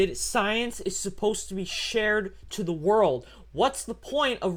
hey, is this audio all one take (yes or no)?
yes